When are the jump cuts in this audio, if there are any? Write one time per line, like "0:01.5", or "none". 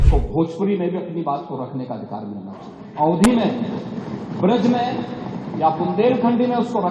none